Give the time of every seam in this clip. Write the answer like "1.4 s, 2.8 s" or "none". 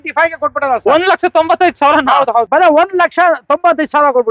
2.4 s